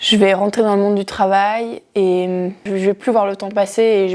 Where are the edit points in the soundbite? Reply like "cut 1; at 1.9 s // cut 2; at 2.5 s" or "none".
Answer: cut 1; at 2.6 s